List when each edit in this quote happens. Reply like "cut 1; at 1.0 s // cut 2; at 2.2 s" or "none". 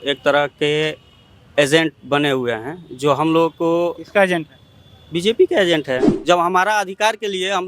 cut 1; at 6.1 s